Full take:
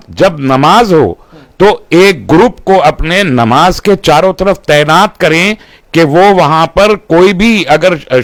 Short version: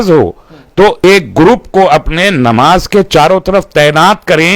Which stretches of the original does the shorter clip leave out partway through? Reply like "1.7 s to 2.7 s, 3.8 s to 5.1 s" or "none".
1.9 s to 2.0 s